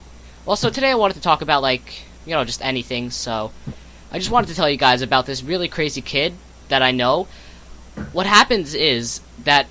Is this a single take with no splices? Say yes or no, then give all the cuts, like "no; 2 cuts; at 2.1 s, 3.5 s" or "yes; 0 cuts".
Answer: no; 1 cut; at 5.0 s